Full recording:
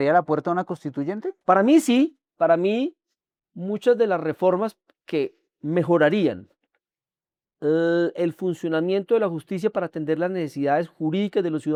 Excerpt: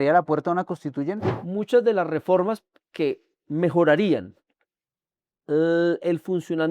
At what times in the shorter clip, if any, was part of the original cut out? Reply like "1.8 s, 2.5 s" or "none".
1.3 s